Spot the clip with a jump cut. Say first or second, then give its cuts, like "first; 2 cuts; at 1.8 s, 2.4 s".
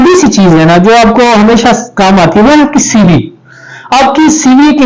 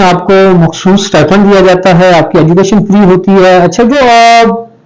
second; 1 cut; at 3.9 s